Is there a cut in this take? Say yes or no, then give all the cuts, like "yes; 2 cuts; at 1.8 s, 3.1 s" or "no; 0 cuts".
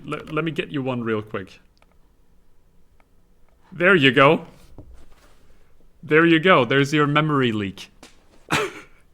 yes; 1 cut; at 2.1 s